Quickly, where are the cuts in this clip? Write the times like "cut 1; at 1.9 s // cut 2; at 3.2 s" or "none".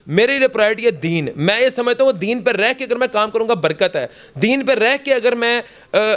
none